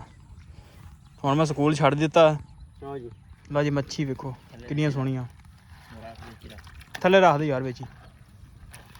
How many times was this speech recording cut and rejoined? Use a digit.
0